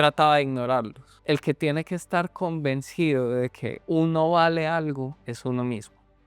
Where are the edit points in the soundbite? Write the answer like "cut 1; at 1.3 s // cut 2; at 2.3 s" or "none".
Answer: cut 1; at 1.1 s // cut 2; at 3.7 s // cut 3; at 5.2 s